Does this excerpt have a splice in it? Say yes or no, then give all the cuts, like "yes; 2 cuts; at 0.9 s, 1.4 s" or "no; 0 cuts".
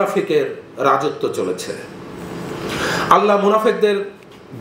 no; 0 cuts